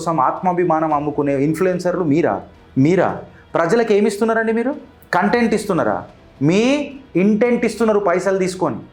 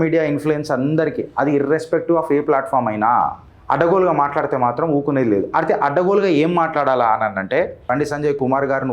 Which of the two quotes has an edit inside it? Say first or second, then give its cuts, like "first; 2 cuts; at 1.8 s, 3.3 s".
second; 2 cuts; at 3.5 s, 7.8 s